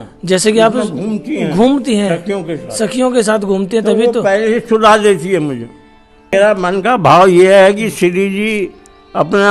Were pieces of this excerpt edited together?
yes; 1 cut; at 6.3 s

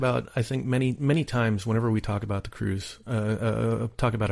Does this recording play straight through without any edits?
yes; 0 cuts

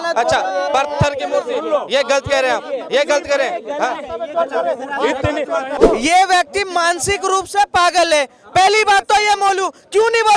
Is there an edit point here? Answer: yes; 1 cut; at 5.7 s

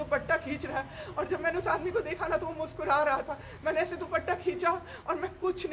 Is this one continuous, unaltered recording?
yes; 0 cuts

